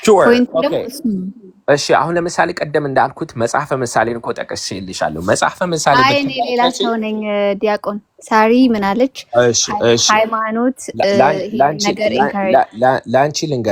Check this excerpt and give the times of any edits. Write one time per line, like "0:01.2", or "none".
none